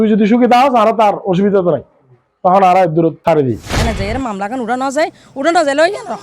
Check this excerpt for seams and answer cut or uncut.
cut